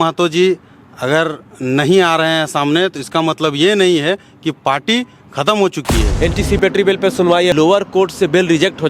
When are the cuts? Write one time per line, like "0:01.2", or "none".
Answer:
0:06.0
0:07.5